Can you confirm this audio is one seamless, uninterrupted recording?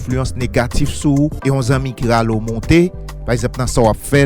no; 1 cut; at 1.4 s

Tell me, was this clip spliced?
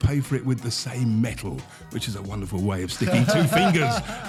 no; 0 cuts

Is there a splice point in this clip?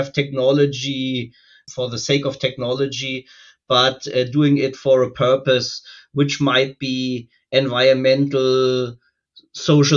yes; 1 cut; at 1.6 s

